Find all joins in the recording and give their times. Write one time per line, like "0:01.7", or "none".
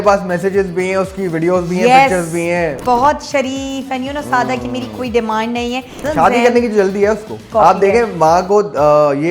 0:02.8
0:06.0
0:07.4